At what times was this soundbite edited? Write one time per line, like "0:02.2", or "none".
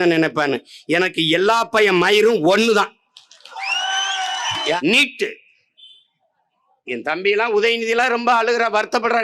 0:04.8